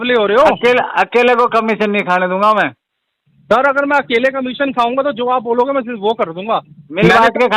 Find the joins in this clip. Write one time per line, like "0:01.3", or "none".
none